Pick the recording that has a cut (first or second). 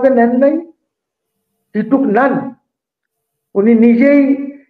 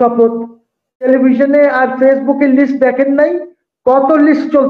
second